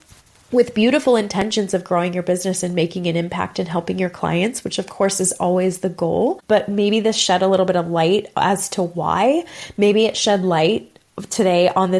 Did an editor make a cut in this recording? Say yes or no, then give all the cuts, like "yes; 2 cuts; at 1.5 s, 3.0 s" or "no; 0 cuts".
yes; 1 cut; at 6.4 s